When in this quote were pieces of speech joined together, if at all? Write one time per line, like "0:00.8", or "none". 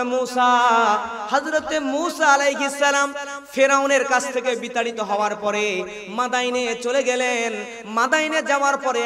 none